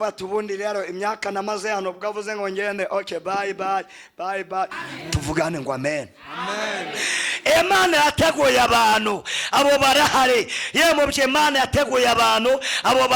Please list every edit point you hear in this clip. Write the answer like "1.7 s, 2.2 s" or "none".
4.8 s